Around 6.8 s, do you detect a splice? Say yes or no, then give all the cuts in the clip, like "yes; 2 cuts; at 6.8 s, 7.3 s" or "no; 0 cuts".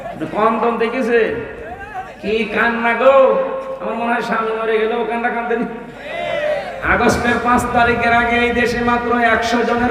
yes; 1 cut; at 6.8 s